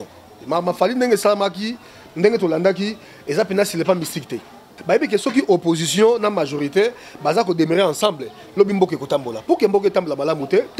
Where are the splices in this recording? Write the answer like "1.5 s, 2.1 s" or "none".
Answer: 4.7 s